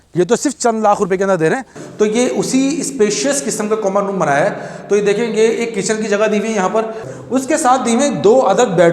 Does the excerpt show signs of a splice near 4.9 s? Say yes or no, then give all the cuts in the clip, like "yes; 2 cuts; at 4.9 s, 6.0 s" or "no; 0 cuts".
no; 2 cuts; at 1.8 s, 7.1 s